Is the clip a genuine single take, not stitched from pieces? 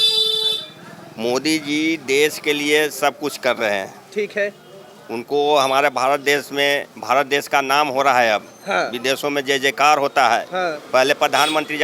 yes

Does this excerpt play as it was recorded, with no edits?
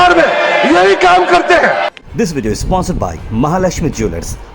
no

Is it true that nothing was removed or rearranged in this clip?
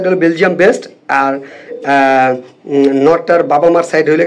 yes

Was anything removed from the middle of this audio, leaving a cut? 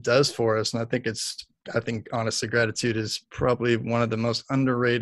no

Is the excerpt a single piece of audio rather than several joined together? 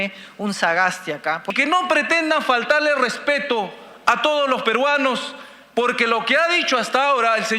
no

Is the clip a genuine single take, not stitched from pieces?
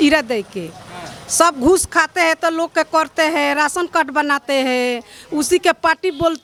yes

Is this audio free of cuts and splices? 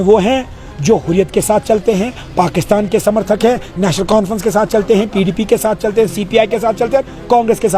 yes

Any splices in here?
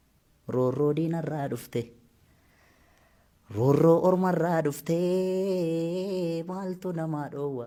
no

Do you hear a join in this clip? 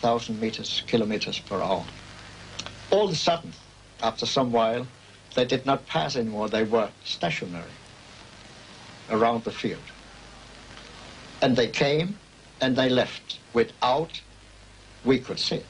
yes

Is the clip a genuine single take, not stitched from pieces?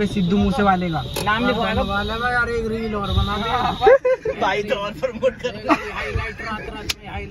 yes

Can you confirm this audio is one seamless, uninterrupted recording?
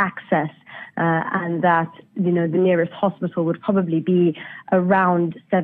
no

